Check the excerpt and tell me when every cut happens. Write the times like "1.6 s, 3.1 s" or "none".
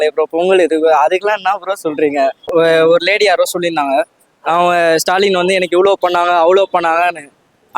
2.4 s